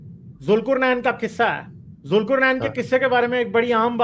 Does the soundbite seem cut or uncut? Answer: uncut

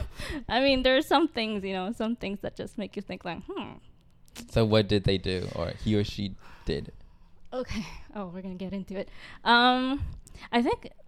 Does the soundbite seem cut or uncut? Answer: uncut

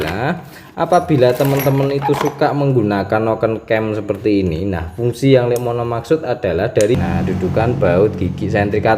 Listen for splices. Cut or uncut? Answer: cut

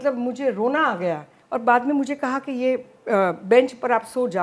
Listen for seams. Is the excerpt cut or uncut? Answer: cut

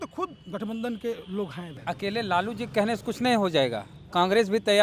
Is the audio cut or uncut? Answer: cut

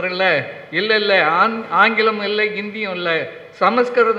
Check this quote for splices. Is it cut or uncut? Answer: uncut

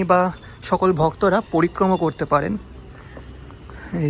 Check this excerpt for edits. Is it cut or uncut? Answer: uncut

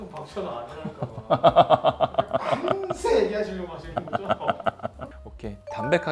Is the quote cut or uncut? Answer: uncut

